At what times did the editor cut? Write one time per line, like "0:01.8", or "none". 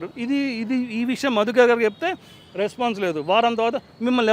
none

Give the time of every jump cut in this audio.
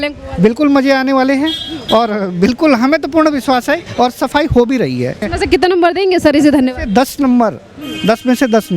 0:05.3

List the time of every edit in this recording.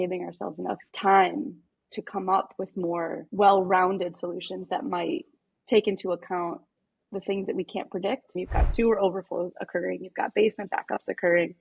0:03.2
0:08.4

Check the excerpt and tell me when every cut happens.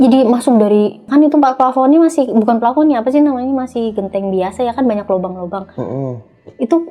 0:01.1

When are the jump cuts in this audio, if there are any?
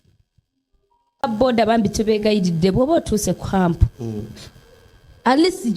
0:01.2

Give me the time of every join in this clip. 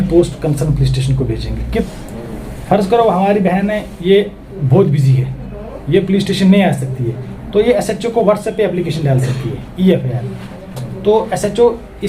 0:01.8

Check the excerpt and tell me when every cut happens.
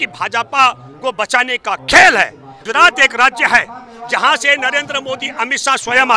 0:02.5

